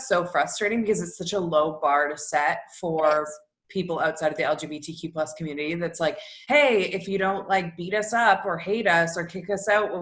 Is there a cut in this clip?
no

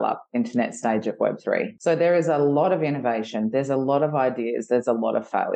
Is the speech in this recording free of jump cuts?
no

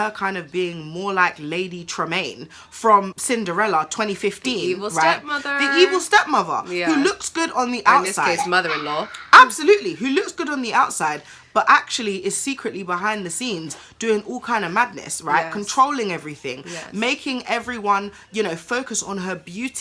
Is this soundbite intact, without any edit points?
no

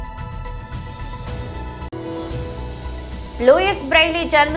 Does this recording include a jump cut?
yes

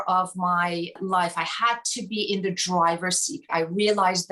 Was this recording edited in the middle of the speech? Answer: yes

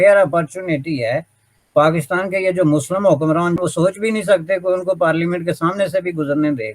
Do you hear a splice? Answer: yes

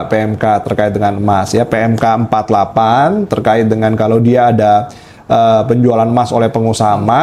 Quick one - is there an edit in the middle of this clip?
no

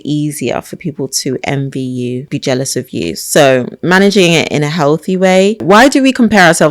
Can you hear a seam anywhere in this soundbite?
yes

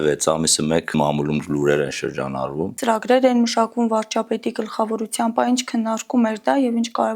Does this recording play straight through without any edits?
no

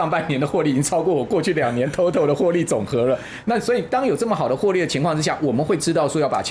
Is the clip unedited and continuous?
yes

